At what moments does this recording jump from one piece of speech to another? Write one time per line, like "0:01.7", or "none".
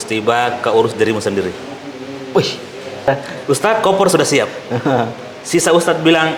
0:03.1